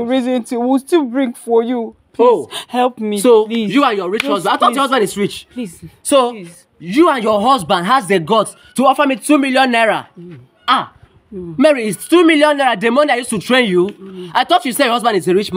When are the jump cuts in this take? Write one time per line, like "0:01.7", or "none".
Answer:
none